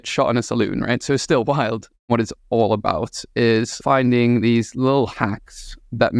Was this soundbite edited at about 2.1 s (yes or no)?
yes